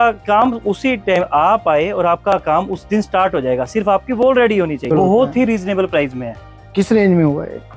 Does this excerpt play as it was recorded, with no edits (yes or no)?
no